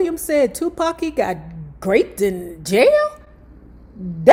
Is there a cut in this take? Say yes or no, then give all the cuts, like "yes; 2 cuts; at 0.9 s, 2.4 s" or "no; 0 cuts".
no; 0 cuts